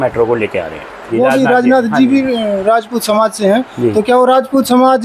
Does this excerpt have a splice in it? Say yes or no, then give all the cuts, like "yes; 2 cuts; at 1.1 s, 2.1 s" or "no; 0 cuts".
yes; 1 cut; at 1.1 s